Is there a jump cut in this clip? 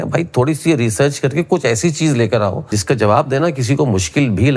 yes; 1 cut; at 2.7 s

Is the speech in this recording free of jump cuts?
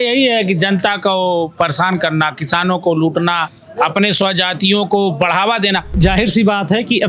no; 2 cuts; at 3.6 s, 6.0 s

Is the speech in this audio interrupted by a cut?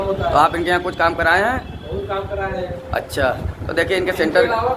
no; 0 cuts

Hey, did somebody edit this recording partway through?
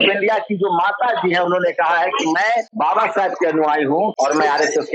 yes; 2 cuts; at 2.7 s, 4.1 s

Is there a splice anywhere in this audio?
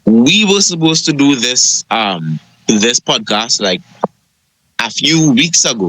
yes; 1 cut; at 2.5 s

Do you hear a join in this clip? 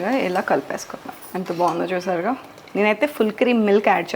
yes; 1 cut; at 1.3 s

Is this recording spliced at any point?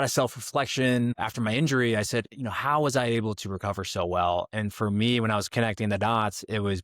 yes; 1 cut; at 1.2 s

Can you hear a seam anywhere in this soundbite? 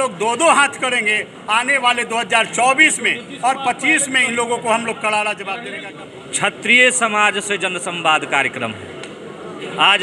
yes; 1 cut; at 5.7 s

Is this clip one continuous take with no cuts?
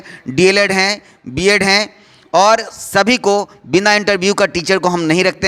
yes; 0 cuts

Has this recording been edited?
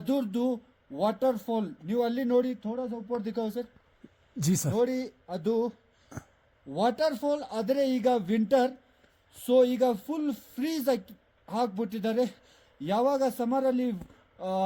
no; 0 cuts

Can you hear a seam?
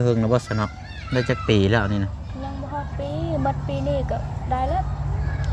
no; 0 cuts

